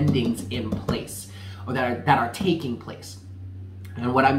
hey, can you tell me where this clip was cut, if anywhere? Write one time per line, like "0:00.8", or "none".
none